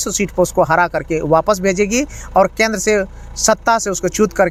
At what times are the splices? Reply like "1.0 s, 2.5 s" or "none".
none